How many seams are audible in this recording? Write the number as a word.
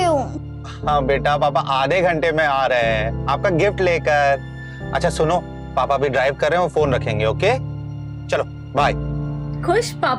zero